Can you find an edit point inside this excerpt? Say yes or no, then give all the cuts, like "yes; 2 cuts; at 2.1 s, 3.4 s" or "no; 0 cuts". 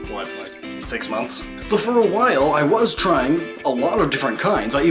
no; 0 cuts